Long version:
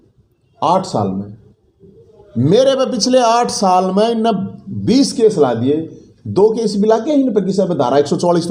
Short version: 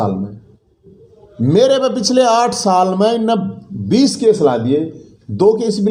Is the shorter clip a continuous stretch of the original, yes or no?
yes